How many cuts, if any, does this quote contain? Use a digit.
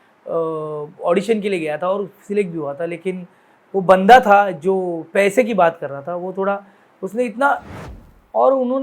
1